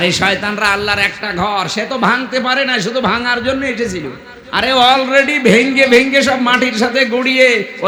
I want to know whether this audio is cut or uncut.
uncut